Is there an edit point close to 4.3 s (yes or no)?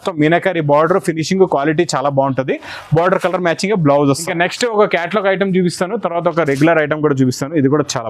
yes